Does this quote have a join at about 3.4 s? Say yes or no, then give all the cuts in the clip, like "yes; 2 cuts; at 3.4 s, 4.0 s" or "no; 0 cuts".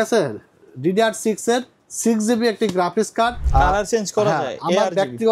yes; 1 cut; at 3.4 s